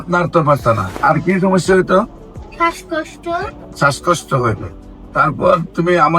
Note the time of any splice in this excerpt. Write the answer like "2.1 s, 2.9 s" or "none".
0.9 s, 3.6 s